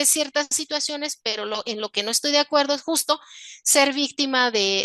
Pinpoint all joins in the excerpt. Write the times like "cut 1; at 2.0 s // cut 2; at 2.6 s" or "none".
none

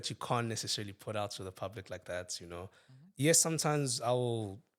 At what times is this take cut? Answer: none

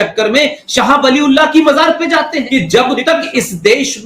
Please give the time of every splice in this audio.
cut 1; at 2.4 s

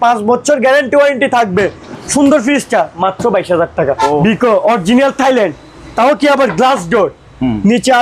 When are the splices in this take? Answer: cut 1; at 1.9 s // cut 2; at 4.1 s

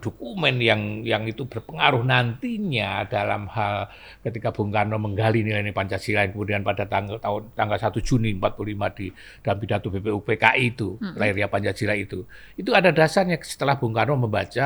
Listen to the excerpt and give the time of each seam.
none

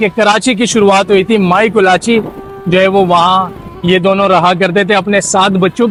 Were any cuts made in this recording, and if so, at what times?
none

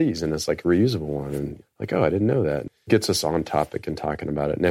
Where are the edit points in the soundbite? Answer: cut 1; at 1.5 s // cut 2; at 2.9 s

